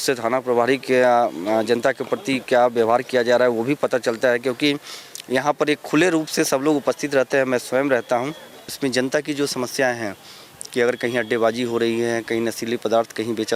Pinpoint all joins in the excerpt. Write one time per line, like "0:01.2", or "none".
0:08.7